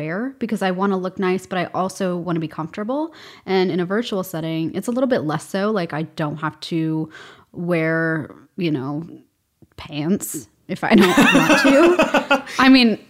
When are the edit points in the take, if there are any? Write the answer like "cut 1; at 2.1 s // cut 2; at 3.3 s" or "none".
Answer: none